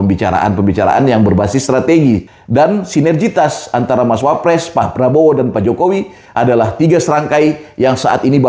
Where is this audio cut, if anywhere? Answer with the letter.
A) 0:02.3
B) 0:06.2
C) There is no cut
A